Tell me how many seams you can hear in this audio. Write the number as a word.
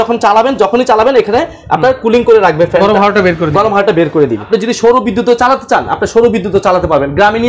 one